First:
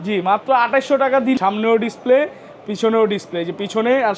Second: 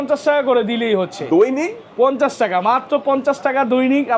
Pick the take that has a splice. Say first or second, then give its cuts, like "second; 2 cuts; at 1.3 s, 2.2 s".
first; 1 cut; at 1.4 s